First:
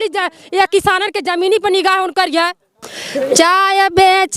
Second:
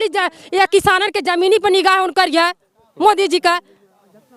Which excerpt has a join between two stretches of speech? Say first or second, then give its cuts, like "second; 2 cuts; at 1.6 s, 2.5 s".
first; 1 cut; at 2.8 s